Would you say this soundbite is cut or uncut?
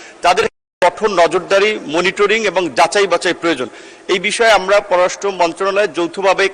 uncut